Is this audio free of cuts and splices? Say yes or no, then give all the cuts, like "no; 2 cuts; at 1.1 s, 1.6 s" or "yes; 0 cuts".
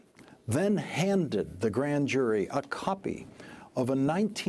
yes; 0 cuts